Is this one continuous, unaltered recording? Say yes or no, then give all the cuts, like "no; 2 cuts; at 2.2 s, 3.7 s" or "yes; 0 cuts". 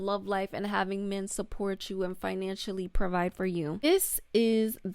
no; 1 cut; at 3.8 s